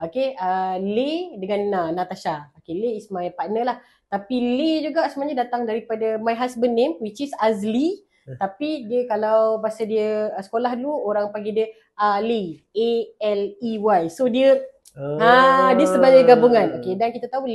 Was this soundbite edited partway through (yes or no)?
no